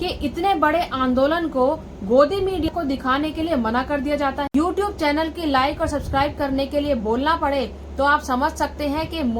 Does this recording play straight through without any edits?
no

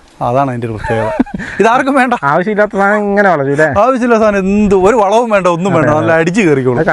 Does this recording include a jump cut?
no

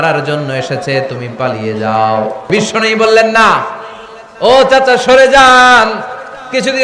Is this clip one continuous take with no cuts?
no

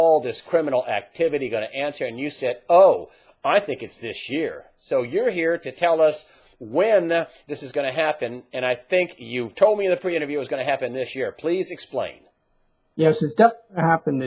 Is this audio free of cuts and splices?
yes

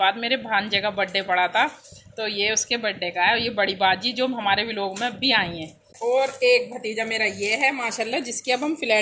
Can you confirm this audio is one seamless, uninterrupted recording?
no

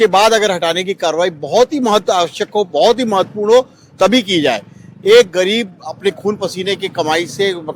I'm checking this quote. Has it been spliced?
no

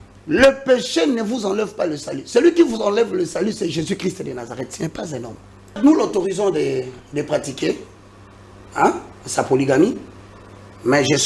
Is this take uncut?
no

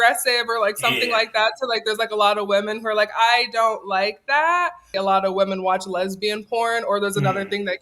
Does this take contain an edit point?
yes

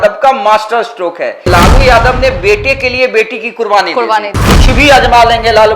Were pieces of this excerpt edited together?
yes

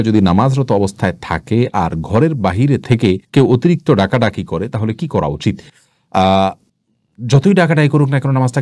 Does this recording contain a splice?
no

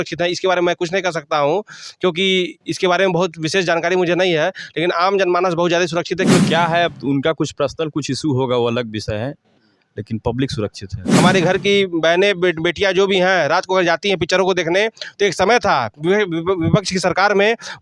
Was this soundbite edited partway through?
yes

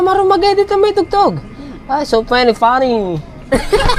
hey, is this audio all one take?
yes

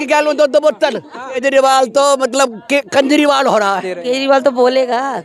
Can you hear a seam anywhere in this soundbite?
yes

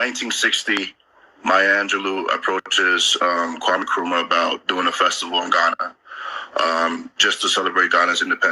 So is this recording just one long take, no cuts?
yes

